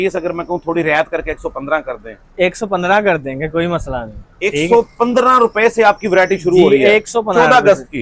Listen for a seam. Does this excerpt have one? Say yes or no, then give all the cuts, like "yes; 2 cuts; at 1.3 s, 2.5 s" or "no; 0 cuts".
no; 0 cuts